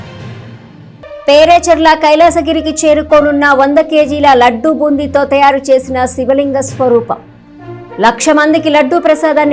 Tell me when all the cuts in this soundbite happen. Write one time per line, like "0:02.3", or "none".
0:01.2